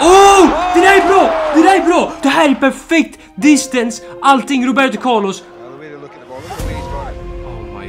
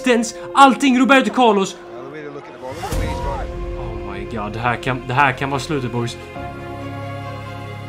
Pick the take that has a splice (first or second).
second